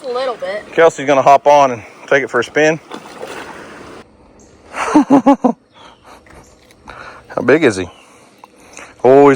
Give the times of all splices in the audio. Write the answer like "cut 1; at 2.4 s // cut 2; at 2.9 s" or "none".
cut 1; at 4.0 s